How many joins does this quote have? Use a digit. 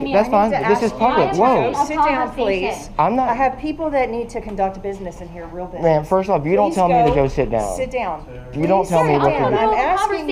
0